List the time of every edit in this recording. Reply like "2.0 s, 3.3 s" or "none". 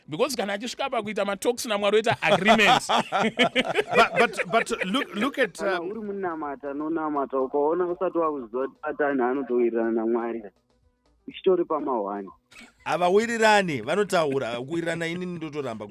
5.7 s